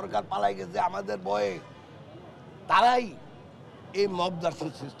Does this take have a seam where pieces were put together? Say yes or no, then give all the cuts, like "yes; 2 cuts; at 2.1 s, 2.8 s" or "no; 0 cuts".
no; 0 cuts